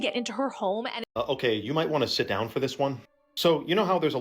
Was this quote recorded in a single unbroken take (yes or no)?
no